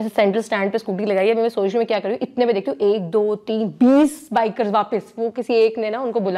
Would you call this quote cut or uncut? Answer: uncut